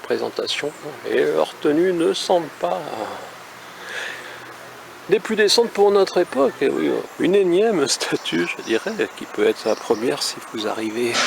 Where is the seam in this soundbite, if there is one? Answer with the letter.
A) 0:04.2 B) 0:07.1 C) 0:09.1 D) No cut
B